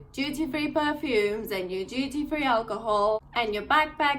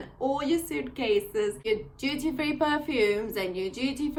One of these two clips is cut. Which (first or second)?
first